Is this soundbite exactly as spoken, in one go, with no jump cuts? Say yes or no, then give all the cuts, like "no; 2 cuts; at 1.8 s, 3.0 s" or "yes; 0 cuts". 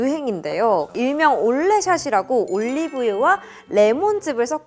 no; 1 cut; at 1.0 s